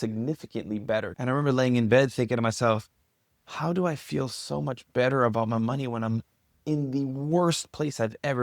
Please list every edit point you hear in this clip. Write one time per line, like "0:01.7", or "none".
0:01.1